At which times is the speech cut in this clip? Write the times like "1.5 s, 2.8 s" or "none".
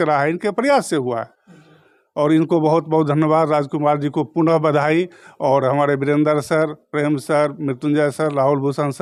none